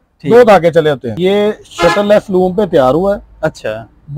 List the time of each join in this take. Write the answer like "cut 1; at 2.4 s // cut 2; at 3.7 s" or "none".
cut 1; at 1.1 s